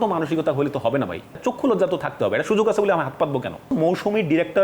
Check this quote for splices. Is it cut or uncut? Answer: cut